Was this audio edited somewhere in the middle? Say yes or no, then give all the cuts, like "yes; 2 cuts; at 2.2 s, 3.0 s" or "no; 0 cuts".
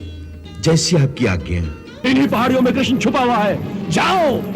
yes; 1 cut; at 2.0 s